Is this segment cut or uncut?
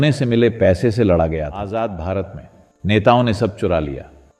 cut